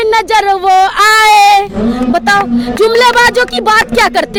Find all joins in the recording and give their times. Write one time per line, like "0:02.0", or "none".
none